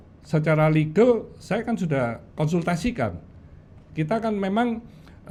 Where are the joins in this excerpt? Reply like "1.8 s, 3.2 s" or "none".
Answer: none

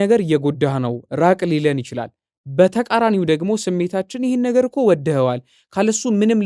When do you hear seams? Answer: none

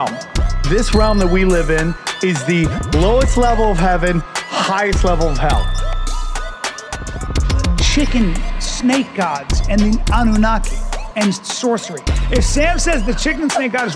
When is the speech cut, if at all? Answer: none

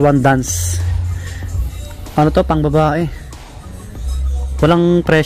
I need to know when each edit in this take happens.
none

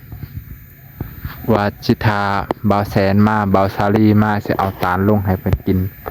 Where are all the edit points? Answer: none

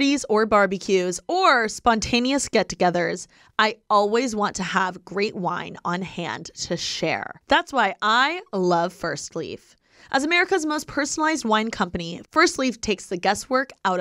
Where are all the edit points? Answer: none

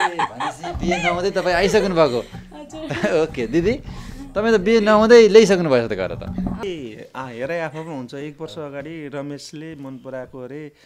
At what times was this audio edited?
6.6 s

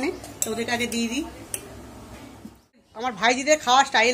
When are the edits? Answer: 2.8 s

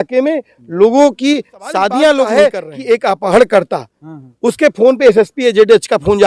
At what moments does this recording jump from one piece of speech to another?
2.4 s

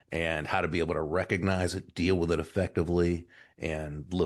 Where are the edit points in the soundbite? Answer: none

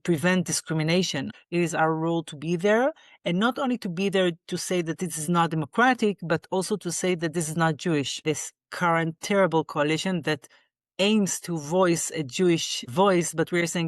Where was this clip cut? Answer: 1.3 s, 8.2 s

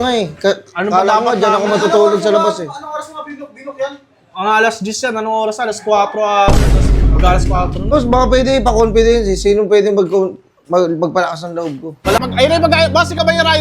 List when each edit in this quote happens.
7.9 s, 12.2 s

